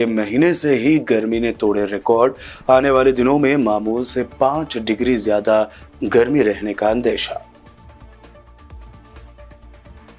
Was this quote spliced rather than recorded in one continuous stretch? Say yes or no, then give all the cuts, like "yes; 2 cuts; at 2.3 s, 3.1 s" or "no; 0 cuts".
no; 0 cuts